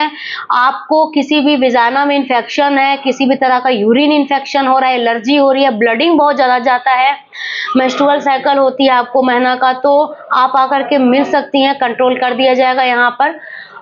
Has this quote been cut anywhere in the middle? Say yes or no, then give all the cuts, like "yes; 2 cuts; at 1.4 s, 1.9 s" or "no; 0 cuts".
no; 0 cuts